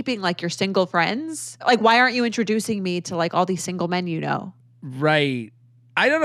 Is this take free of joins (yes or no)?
yes